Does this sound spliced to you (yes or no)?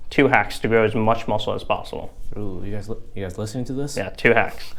no